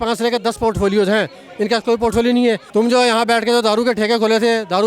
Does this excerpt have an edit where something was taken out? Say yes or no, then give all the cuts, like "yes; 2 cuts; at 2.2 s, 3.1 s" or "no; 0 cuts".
yes; 1 cut; at 2.6 s